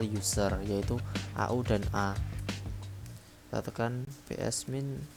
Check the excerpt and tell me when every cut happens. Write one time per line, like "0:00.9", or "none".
none